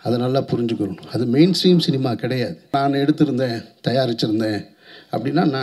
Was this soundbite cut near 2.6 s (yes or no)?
yes